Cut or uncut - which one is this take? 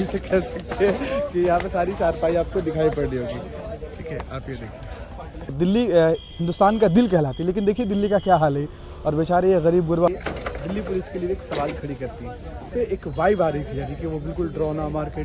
cut